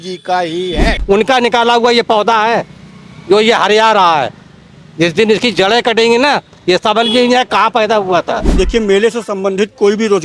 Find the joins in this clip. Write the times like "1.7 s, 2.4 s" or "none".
1.0 s, 8.5 s